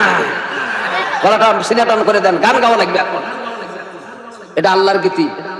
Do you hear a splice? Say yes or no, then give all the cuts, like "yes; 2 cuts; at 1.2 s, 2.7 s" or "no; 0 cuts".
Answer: no; 0 cuts